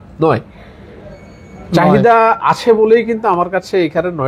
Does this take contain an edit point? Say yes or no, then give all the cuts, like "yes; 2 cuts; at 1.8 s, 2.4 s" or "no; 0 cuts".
no; 0 cuts